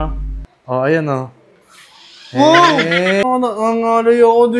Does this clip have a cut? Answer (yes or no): yes